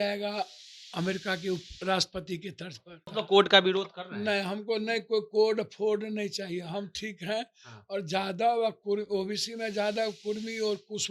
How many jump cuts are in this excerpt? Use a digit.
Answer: 1